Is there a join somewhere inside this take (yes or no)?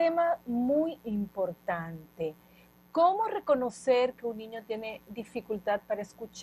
no